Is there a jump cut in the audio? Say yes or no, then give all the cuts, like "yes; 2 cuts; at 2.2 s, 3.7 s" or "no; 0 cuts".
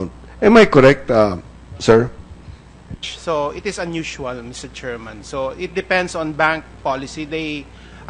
no; 0 cuts